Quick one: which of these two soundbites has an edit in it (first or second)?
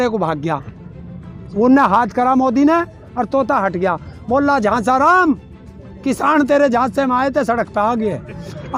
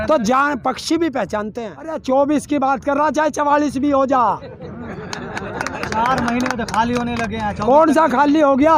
second